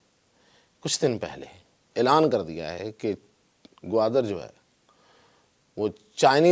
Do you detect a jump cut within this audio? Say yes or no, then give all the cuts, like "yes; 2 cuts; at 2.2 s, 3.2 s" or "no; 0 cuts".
no; 0 cuts